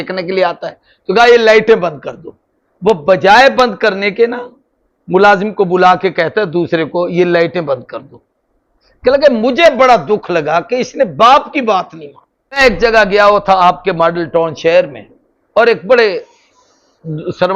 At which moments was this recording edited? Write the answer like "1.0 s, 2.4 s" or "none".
12.6 s